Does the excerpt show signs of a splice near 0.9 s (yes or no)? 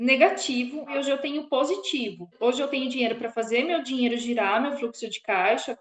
yes